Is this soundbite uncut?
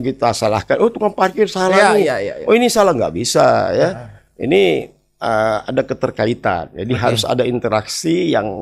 yes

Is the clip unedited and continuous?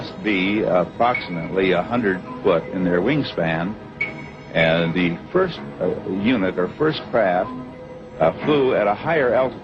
yes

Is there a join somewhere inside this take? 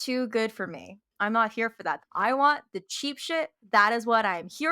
yes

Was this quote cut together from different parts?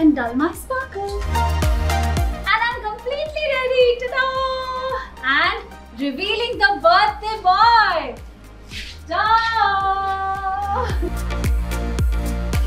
no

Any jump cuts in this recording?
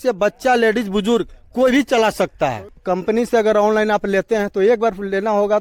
yes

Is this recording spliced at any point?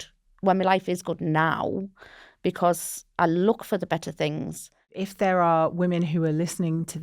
yes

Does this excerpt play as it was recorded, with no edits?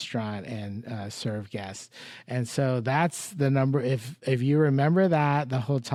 yes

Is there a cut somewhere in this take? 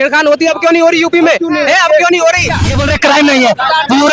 yes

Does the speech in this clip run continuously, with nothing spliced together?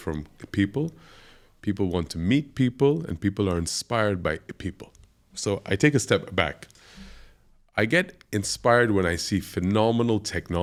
yes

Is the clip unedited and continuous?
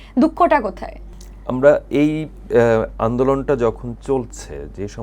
yes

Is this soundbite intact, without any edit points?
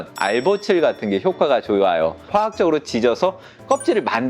no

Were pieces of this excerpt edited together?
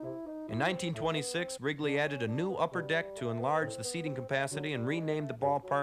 no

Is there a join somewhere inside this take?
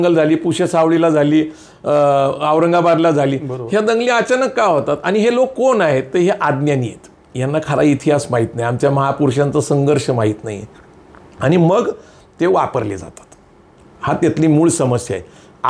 no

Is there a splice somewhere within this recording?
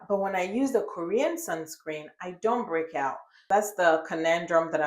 yes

